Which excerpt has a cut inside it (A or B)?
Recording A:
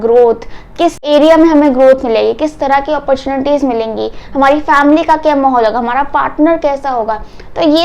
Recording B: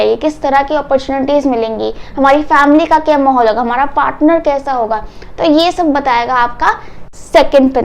A